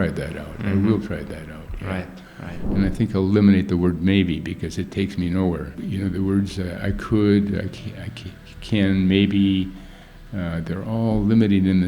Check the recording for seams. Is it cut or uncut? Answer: cut